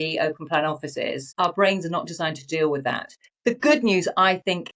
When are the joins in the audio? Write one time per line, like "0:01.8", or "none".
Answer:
none

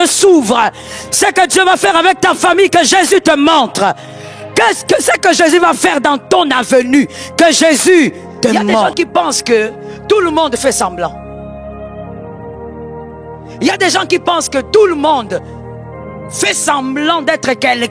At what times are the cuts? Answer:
0:08.9

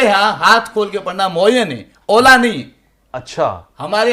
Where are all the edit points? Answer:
none

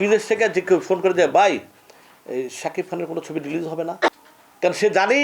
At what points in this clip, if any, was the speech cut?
0:04.1

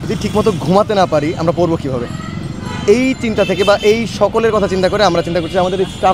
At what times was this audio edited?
none

